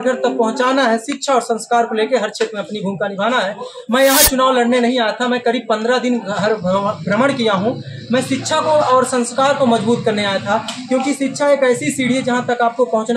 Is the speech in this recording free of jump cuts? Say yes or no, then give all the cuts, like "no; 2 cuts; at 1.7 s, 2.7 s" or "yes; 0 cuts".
yes; 0 cuts